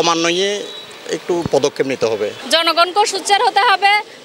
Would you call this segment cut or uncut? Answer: cut